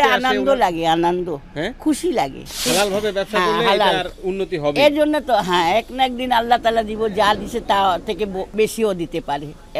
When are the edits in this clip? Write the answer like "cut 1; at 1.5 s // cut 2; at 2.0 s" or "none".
cut 1; at 2.7 s // cut 2; at 8.4 s